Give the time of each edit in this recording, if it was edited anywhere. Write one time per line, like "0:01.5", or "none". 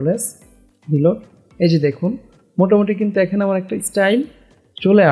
none